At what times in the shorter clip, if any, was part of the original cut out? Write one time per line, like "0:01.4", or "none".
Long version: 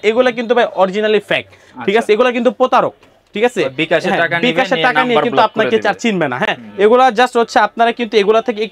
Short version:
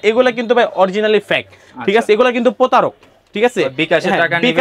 none